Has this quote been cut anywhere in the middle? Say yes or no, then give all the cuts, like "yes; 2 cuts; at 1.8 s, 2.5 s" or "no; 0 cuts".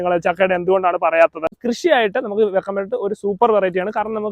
yes; 1 cut; at 1.6 s